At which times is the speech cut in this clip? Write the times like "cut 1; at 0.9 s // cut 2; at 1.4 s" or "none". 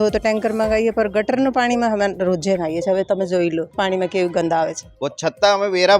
cut 1; at 3.7 s // cut 2; at 4.8 s